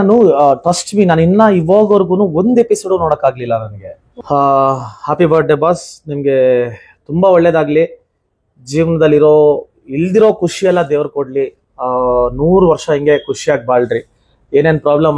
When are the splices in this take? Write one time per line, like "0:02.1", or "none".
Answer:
0:04.2